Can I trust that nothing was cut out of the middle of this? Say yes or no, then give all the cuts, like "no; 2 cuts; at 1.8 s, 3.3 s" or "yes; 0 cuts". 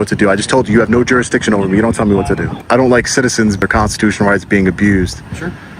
no; 2 cuts; at 2.5 s, 3.6 s